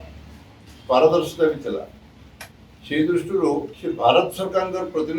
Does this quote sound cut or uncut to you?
cut